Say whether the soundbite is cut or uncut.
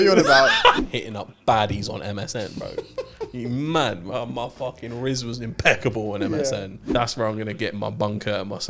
cut